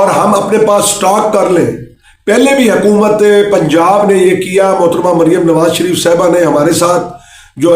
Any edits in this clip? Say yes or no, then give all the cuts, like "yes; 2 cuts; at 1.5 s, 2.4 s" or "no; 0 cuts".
no; 0 cuts